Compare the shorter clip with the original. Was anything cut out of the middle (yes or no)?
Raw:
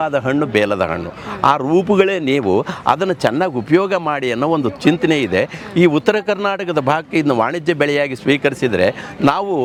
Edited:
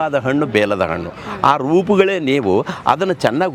no